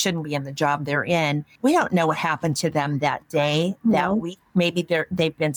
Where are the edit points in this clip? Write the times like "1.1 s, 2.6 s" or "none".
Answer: 1.5 s